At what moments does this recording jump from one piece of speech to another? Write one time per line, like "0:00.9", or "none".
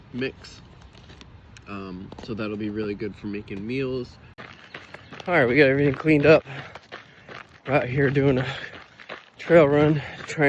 0:04.2

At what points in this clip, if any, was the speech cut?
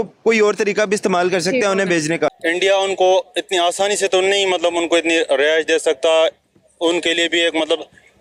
0:02.4

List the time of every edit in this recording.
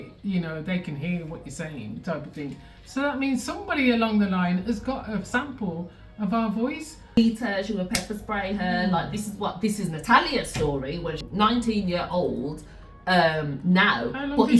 0:07.2
0:11.2

